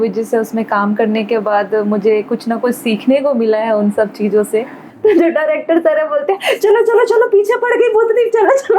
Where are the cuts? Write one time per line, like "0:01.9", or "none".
0:04.8